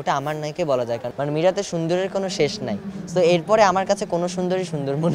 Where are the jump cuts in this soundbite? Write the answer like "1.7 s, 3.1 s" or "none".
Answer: 1.1 s